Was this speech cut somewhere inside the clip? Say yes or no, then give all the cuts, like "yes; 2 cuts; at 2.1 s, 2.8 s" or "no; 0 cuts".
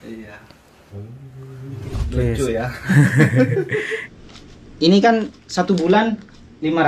yes; 1 cut; at 4.0 s